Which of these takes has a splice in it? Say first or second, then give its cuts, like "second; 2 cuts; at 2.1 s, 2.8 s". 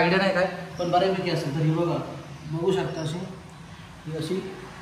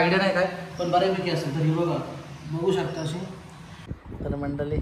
second; 1 cut; at 3.8 s